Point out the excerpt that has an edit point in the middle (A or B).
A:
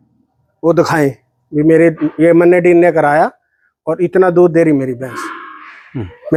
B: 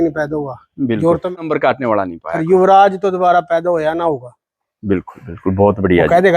B